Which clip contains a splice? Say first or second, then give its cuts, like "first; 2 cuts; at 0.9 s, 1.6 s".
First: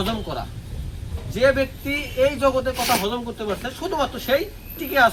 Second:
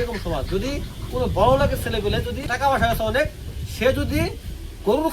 second; 1 cut; at 2.5 s